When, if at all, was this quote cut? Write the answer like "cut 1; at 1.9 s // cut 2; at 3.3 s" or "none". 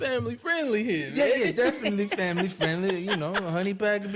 none